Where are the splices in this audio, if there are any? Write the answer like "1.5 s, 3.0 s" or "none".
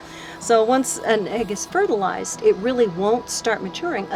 none